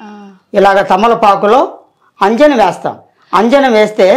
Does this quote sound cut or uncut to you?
uncut